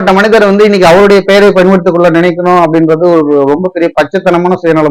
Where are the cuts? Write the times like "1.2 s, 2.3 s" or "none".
none